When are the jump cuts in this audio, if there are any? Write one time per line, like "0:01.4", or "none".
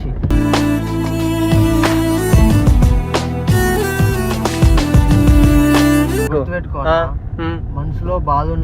0:06.3